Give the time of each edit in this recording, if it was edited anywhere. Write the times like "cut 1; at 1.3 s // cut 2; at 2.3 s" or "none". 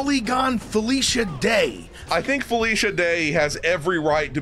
cut 1; at 2.0 s